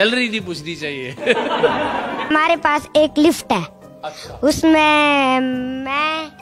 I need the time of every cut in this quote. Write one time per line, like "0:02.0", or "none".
0:02.3